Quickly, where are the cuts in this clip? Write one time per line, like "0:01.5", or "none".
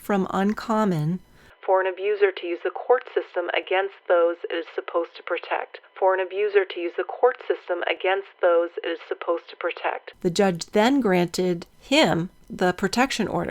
0:10.1